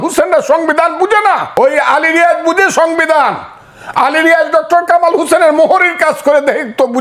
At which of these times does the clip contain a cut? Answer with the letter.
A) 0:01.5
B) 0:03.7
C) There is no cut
A